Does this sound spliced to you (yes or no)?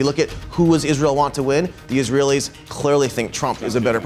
no